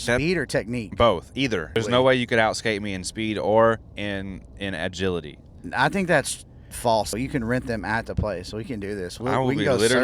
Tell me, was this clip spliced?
yes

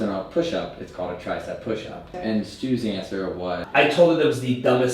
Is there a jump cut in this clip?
yes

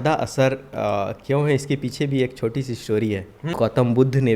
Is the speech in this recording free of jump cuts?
no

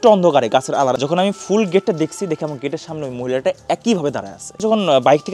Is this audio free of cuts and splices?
no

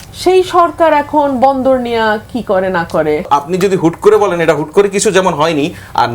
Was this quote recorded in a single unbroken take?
no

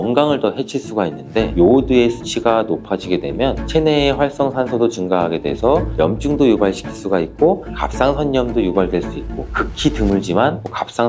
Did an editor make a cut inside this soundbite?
yes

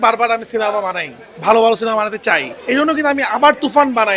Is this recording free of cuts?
no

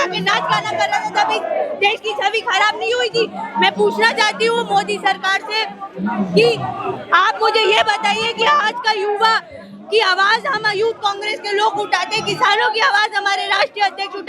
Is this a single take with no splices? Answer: yes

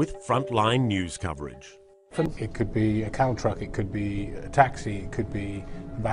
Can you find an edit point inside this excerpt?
yes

